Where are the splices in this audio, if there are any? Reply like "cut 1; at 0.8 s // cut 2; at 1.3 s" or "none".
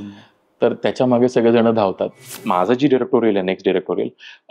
cut 1; at 2.4 s